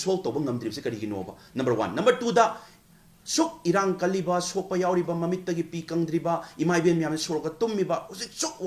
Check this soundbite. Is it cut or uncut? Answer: uncut